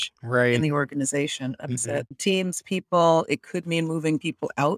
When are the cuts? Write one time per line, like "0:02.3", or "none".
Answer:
none